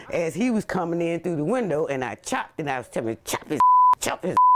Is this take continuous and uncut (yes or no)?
yes